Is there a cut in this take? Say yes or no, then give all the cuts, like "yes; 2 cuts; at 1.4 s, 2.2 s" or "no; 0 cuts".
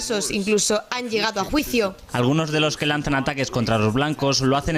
no; 0 cuts